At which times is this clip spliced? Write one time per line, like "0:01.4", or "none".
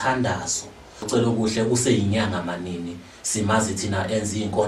0:01.1